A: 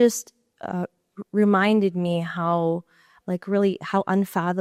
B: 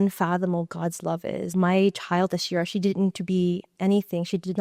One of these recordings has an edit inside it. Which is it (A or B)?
B